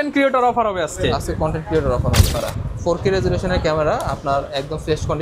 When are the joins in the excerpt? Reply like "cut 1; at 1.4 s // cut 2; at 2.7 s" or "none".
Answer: cut 1; at 2.4 s